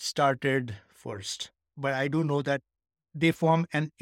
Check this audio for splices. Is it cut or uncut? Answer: cut